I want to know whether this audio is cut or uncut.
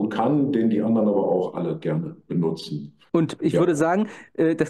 cut